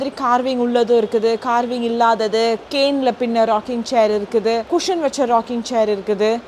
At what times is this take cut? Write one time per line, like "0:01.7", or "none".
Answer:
none